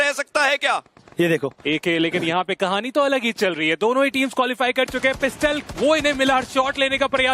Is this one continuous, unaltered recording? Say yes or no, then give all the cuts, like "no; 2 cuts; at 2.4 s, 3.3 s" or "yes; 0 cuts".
no; 1 cut; at 1.0 s